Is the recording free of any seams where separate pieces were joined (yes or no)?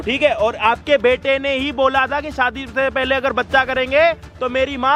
yes